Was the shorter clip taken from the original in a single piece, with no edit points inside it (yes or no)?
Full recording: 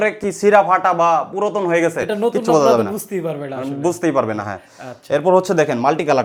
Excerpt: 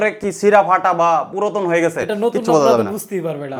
yes